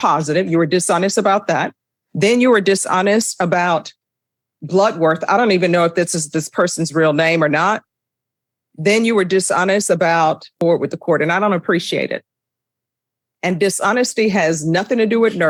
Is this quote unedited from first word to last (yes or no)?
yes